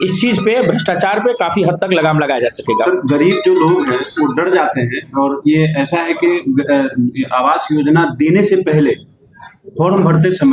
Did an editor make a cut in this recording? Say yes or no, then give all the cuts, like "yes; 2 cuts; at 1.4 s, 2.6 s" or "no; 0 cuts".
no; 0 cuts